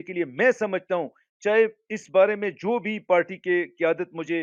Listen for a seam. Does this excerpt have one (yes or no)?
no